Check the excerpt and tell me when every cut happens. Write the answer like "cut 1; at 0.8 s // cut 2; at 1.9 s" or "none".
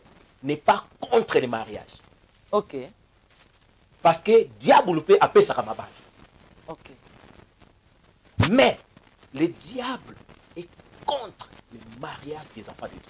none